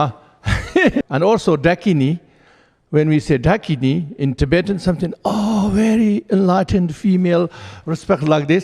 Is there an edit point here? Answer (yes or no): yes